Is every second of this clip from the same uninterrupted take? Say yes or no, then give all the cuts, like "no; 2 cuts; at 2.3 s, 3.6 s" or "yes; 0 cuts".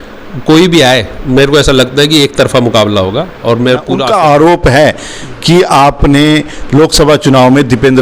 no; 1 cut; at 3.9 s